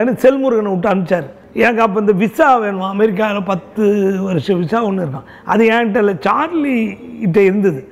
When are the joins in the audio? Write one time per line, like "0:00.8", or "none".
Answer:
0:01.4

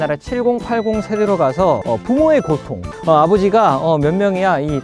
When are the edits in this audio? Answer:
0:01.8
0:02.9

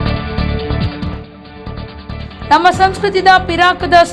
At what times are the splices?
none

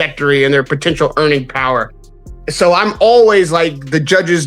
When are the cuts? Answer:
none

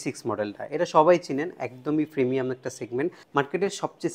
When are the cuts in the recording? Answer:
0:03.2

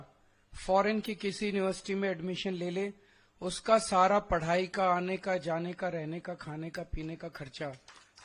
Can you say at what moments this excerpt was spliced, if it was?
none

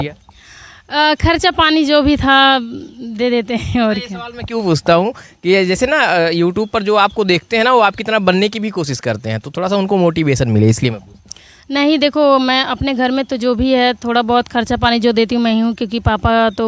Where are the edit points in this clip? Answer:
none

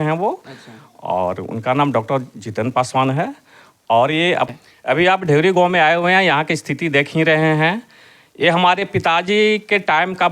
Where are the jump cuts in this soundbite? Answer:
0:04.5

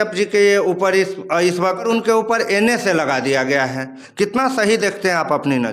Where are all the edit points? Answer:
0:01.8
0:04.0

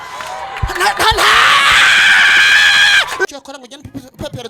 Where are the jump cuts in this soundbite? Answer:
0:03.2

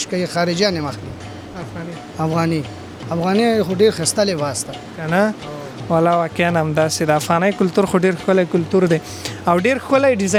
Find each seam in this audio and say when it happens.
none

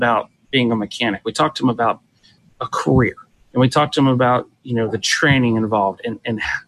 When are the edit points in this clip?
0:02.4

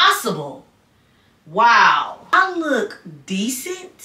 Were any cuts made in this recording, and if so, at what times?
0:02.3

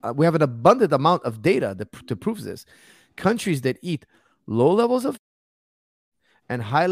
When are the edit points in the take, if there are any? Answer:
0:05.8

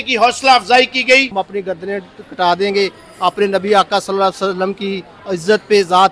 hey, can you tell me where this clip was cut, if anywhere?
0:01.3

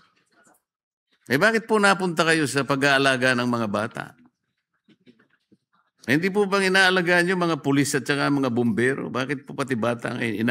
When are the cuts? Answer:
0:05.4

